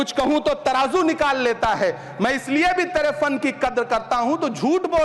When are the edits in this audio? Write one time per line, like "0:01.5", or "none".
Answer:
none